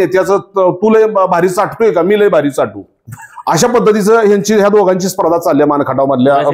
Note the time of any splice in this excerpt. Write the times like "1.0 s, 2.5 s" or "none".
none